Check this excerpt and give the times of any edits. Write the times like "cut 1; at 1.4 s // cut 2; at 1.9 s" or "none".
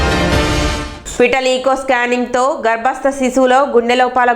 cut 1; at 1.0 s